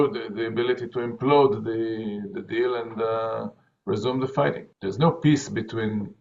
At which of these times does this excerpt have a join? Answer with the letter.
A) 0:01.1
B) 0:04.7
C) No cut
B